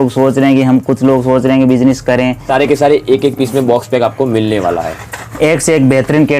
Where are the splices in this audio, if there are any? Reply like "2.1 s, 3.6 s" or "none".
2.4 s